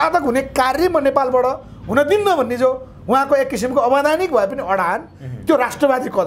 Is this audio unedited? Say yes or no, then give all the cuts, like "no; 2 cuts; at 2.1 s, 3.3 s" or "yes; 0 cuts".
yes; 0 cuts